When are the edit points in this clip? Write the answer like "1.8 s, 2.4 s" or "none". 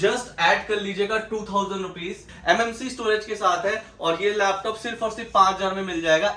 2.3 s